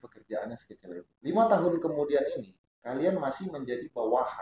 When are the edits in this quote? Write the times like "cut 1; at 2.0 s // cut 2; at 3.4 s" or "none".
none